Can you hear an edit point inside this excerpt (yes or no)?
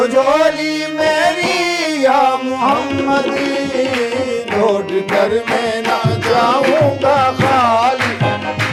no